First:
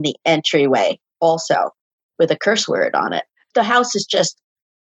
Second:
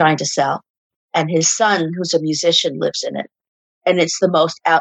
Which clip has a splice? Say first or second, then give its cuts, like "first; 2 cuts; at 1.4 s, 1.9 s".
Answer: first; 1 cut; at 3.3 s